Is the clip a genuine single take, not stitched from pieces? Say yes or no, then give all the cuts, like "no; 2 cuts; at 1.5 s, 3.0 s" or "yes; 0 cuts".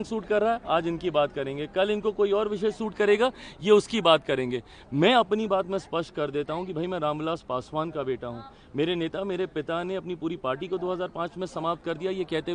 yes; 0 cuts